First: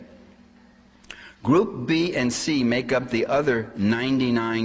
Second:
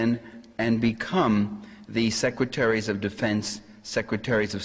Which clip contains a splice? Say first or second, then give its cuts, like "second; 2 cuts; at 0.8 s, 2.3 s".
second; 1 cut; at 3.5 s